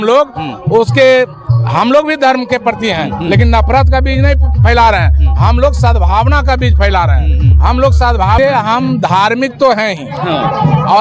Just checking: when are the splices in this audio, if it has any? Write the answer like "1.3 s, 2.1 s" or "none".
8.4 s